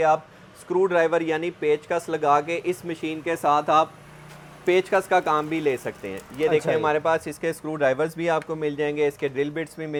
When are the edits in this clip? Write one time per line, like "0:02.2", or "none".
none